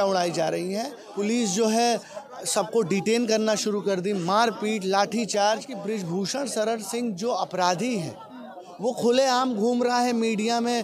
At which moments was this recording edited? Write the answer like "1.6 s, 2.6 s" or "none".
1.0 s, 5.7 s